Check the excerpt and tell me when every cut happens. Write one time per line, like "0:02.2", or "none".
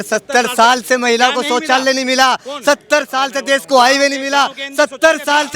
none